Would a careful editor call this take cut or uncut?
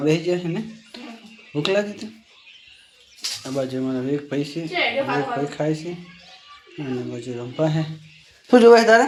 uncut